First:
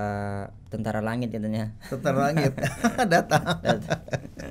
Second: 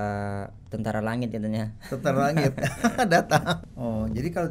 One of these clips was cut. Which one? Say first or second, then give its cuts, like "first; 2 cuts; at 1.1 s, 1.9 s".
second; 1 cut; at 3.6 s